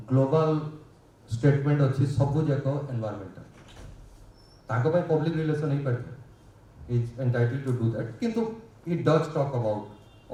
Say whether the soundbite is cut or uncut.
uncut